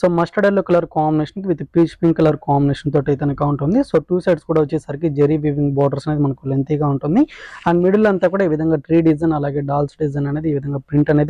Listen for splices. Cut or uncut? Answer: uncut